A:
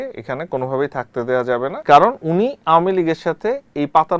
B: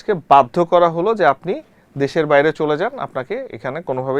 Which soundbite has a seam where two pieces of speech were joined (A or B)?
A